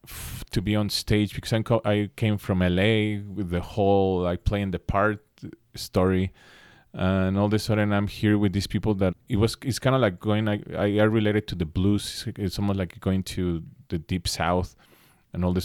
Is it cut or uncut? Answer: cut